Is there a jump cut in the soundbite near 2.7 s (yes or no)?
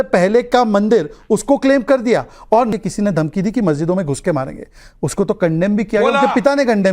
yes